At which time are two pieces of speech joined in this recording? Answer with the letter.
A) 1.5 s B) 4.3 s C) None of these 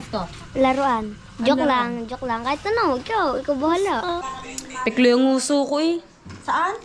B